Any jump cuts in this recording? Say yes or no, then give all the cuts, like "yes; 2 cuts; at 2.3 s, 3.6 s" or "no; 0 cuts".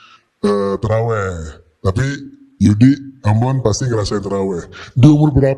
no; 0 cuts